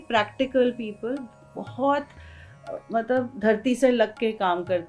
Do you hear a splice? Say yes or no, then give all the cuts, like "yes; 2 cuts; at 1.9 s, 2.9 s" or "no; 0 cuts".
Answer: no; 0 cuts